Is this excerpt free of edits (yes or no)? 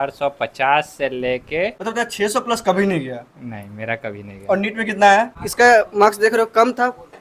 no